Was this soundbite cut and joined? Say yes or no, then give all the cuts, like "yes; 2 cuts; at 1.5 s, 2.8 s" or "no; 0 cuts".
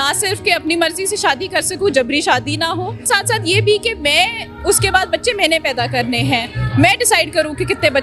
yes; 1 cut; at 3.1 s